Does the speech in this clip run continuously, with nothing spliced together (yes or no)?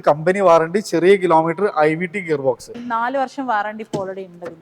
no